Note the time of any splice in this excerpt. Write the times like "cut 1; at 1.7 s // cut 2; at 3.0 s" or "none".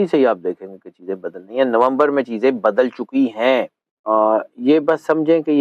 cut 1; at 4.0 s